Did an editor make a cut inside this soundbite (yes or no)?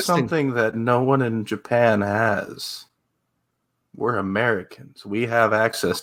no